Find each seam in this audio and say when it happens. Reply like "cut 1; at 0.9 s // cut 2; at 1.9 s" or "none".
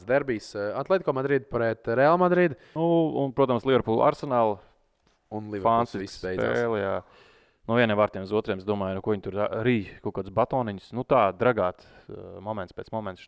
cut 1; at 2.6 s